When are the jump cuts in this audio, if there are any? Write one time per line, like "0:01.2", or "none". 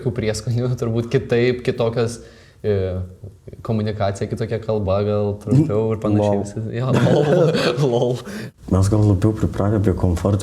0:08.4